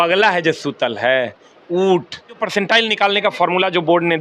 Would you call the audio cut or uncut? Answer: cut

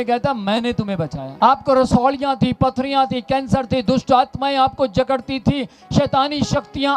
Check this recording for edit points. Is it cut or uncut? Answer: cut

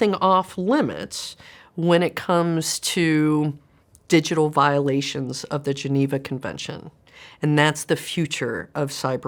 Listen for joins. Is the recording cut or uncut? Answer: uncut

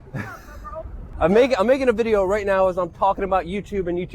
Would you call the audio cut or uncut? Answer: cut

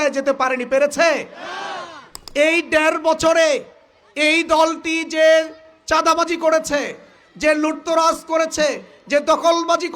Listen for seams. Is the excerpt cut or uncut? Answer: cut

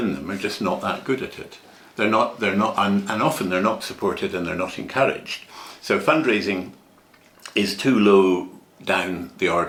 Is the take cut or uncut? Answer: uncut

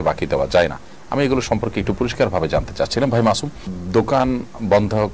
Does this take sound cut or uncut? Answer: uncut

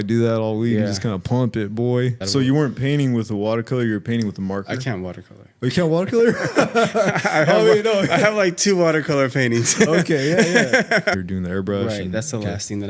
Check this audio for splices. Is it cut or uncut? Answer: cut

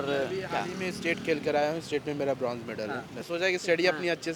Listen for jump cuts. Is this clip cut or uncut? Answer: cut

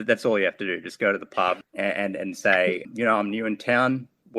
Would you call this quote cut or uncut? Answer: cut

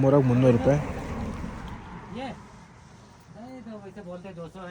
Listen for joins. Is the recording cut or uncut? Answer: uncut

